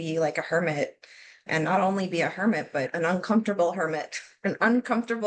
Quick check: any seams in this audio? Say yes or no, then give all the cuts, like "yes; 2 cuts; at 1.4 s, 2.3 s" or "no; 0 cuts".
no; 0 cuts